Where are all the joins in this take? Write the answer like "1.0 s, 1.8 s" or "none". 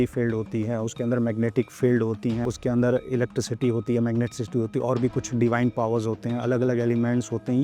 2.4 s